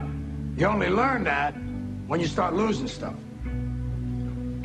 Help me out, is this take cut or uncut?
cut